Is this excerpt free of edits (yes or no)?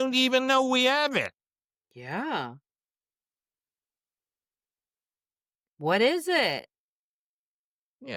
yes